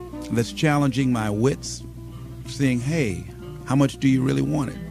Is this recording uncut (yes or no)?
no